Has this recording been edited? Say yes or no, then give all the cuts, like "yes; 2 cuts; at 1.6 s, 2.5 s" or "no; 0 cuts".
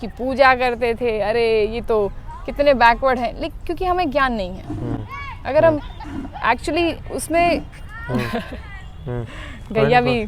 no; 0 cuts